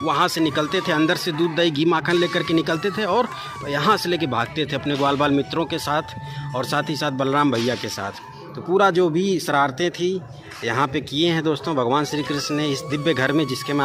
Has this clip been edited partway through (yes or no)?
no